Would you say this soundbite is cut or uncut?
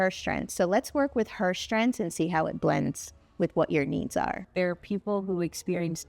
cut